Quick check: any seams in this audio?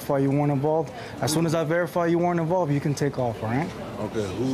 no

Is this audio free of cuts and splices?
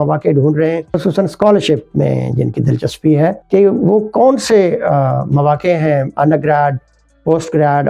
no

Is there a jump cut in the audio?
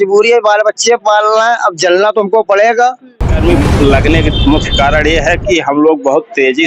yes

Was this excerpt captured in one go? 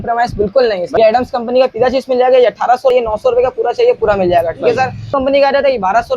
no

